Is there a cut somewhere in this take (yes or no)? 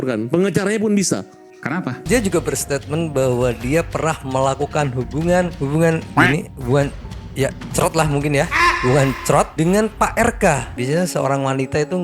yes